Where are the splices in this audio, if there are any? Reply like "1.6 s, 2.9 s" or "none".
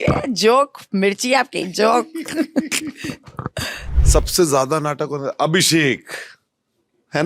3.9 s